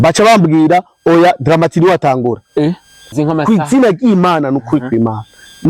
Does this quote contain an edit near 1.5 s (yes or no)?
no